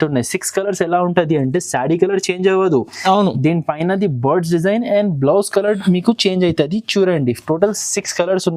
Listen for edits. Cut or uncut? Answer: uncut